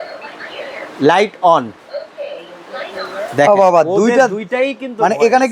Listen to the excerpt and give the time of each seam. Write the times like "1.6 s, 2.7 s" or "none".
1.8 s